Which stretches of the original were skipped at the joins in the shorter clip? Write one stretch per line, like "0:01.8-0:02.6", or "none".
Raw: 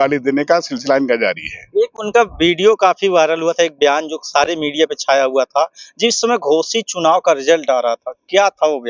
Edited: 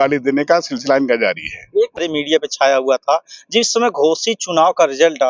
0:02.0-0:04.5